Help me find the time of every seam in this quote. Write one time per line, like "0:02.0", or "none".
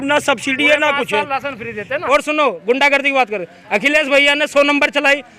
0:02.0